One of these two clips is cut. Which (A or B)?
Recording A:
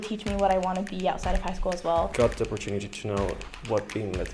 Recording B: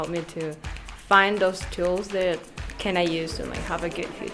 A